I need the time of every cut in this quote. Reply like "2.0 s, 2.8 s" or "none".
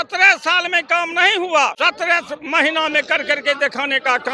1.7 s